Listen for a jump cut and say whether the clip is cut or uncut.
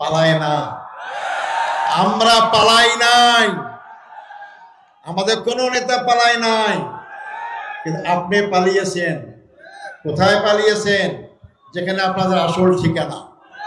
uncut